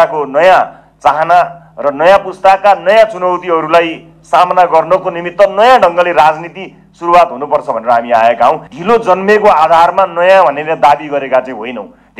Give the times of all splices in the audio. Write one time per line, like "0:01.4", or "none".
0:08.7